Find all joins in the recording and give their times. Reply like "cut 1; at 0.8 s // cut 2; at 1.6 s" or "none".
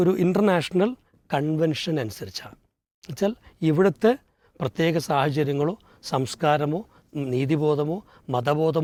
none